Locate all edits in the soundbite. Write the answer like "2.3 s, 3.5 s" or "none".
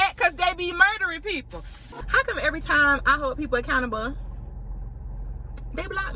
1.8 s